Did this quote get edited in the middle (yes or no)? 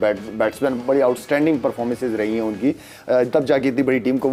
no